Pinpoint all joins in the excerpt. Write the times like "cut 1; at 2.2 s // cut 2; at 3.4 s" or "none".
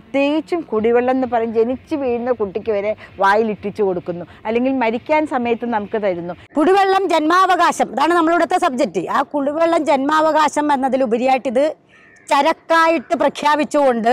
cut 1; at 6.4 s